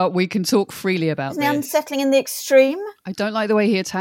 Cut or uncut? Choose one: cut